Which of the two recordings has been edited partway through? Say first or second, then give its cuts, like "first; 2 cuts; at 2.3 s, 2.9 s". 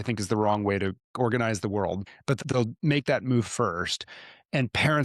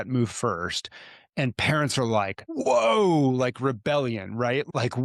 first; 2 cuts; at 1.1 s, 2.1 s